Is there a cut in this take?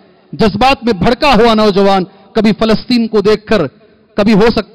no; 0 cuts

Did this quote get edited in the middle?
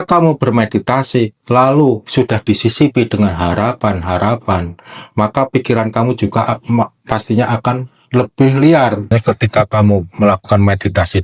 yes; 1 cut; at 9.0 s

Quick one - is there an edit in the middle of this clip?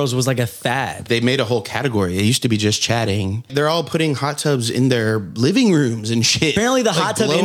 yes; 3 cuts; at 1.0 s, 3.5 s, 6.5 s

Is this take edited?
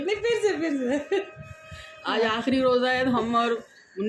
no; 0 cuts

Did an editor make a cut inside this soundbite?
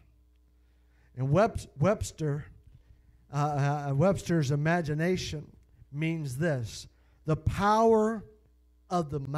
yes; 1 cut; at 4.2 s

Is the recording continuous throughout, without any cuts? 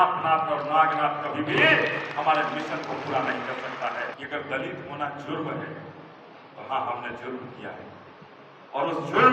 no; 1 cut; at 4.1 s

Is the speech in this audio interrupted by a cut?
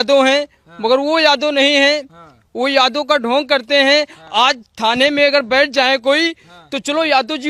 no; 0 cuts

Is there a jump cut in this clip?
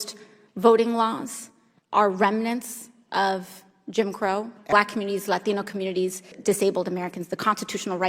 yes; 2 cuts; at 4.6 s, 6.4 s

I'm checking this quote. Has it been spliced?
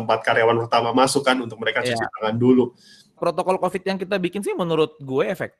yes; 1 cut; at 3.2 s

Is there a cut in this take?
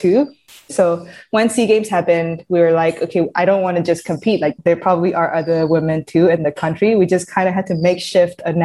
yes; 2 cuts; at 3.3 s, 4.6 s

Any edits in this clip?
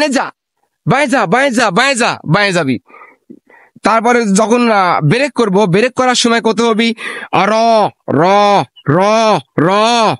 no; 0 cuts

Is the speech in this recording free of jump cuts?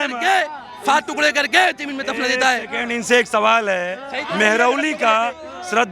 yes; 0 cuts

